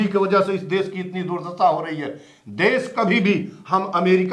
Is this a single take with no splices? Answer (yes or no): yes